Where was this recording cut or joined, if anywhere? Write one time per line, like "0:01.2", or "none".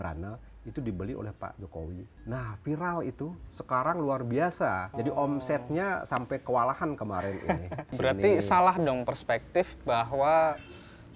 0:02.1
0:04.9
0:07.9